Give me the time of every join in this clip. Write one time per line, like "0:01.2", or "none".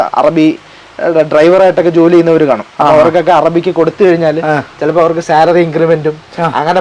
none